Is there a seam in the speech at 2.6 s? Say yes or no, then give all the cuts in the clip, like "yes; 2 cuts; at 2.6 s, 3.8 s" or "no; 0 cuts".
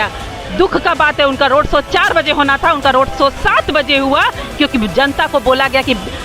no; 0 cuts